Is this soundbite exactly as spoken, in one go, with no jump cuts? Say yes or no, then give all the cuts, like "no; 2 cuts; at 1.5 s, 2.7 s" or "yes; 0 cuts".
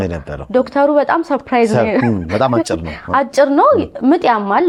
yes; 0 cuts